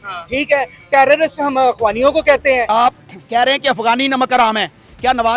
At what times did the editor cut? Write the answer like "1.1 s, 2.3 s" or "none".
2.7 s